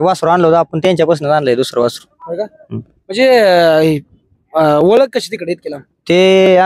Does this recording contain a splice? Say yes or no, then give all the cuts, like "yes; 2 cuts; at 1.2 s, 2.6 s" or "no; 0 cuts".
no; 0 cuts